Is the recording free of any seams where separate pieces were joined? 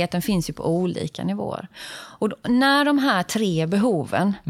yes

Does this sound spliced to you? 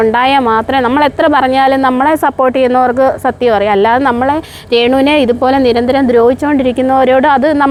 no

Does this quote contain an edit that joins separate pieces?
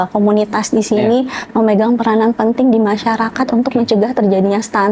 no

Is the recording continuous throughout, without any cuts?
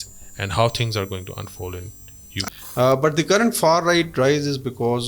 no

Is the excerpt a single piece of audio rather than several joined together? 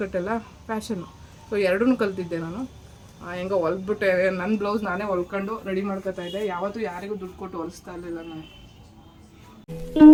yes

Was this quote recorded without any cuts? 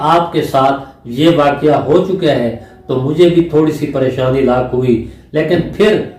yes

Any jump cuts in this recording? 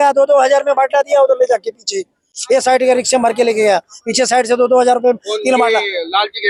no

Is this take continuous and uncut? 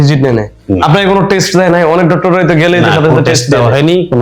yes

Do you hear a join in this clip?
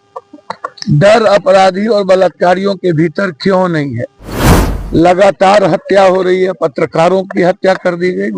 no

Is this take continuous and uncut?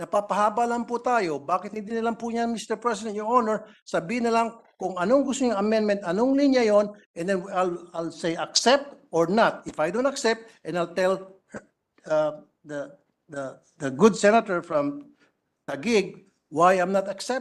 yes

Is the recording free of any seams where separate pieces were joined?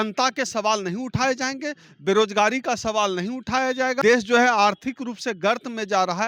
no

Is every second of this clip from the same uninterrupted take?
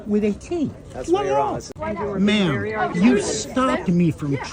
no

